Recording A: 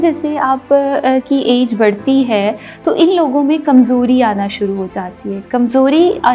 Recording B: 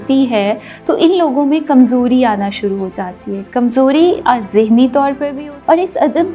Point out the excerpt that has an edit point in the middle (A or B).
B